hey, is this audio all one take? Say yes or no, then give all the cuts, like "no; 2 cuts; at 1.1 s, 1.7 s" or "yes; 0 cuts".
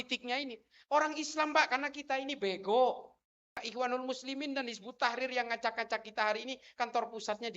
no; 1 cut; at 3.7 s